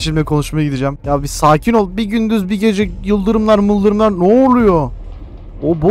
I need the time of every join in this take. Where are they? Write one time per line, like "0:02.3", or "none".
0:01.0